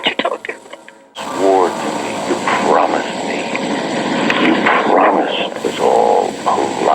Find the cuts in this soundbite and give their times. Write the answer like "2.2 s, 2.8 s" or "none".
5.5 s

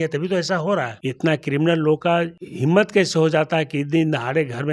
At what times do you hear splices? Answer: 1.0 s, 2.4 s

